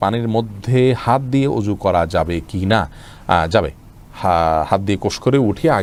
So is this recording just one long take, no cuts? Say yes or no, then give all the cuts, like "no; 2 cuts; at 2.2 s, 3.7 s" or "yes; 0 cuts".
yes; 0 cuts